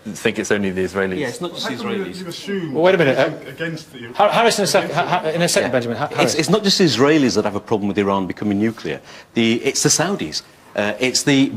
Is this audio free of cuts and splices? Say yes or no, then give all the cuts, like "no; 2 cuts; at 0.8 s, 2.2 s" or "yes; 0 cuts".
no; 1 cut; at 1.8 s